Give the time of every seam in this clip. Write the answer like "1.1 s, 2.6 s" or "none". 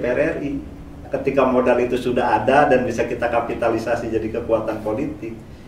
1.1 s